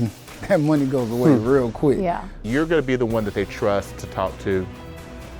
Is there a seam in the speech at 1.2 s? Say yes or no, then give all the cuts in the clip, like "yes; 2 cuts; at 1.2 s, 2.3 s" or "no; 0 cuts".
no; 1 cut; at 2.4 s